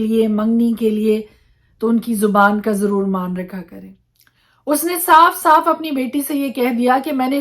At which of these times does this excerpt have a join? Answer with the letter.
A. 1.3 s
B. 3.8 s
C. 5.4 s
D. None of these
B